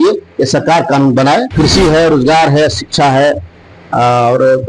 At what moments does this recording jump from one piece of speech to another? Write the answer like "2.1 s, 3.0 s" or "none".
1.5 s